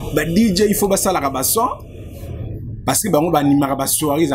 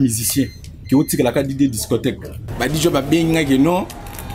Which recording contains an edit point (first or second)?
second